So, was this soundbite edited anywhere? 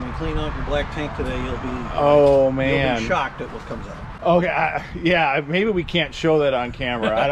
no; 0 cuts

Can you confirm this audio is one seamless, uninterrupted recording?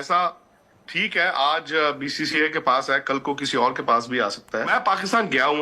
no; 1 cut; at 4.7 s

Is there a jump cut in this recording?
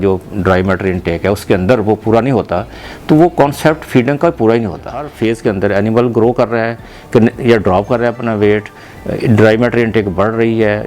yes; 1 cut; at 5.1 s

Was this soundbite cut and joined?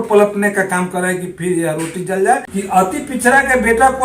yes; 1 cut; at 2.5 s

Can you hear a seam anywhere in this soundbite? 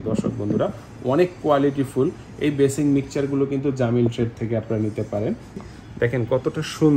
yes; 1 cut; at 5.6 s

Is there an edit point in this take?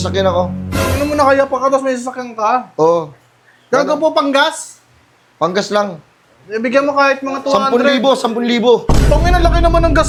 no; 0 cuts

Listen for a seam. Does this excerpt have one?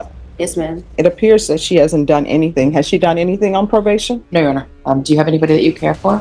yes; 2 cuts; at 0.9 s, 4.7 s

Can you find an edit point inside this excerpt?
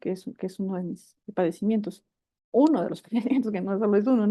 no; 0 cuts

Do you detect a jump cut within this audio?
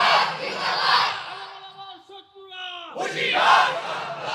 no; 0 cuts

